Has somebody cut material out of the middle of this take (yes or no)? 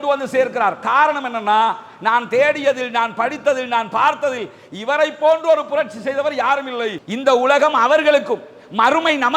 yes